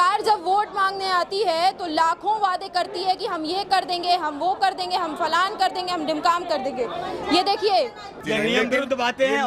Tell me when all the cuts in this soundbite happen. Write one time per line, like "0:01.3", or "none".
0:08.2